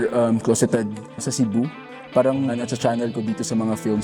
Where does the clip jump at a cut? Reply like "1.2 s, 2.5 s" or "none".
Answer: 2.5 s

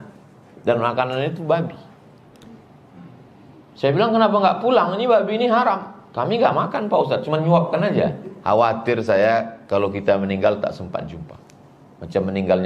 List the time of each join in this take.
8.3 s

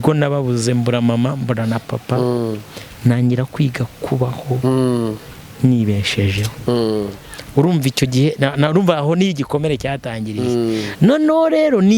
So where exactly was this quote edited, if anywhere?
none

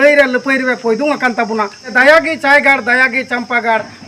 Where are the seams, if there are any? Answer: 1.9 s

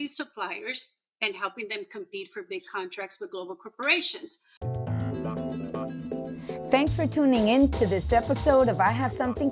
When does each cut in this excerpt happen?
4.4 s

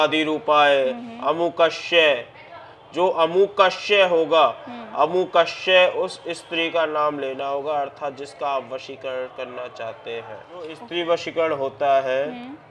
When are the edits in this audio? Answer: 10.8 s

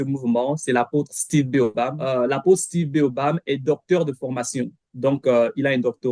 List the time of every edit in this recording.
2.0 s

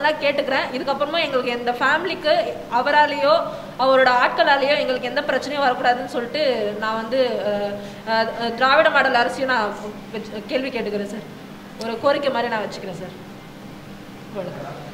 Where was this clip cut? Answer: none

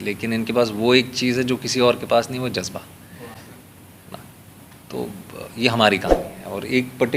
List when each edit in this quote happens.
none

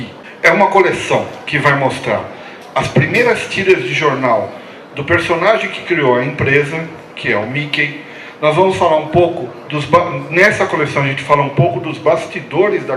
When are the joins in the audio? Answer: 8.4 s

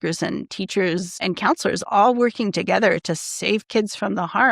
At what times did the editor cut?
1.2 s

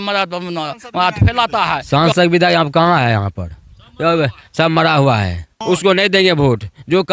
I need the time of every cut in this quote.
1.8 s, 5.5 s

